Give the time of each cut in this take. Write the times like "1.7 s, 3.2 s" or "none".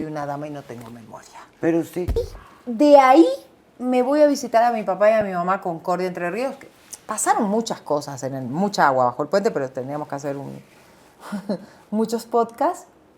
2.2 s